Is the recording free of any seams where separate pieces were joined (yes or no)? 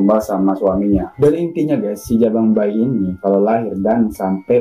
no